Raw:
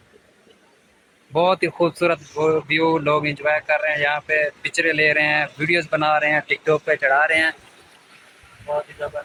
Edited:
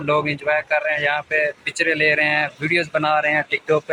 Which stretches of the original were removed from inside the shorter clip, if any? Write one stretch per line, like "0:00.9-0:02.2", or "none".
none